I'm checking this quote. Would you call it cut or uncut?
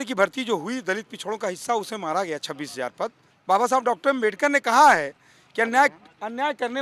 cut